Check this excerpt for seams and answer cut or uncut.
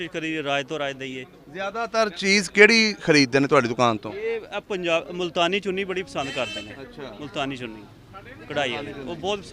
uncut